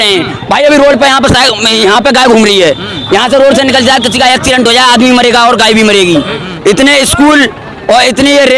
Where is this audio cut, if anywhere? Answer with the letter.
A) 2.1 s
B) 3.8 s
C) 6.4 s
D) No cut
C